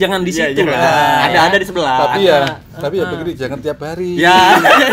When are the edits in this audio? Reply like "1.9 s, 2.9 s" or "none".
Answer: none